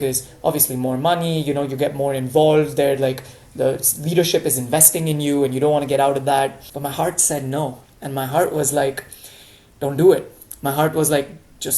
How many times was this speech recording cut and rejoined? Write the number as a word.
one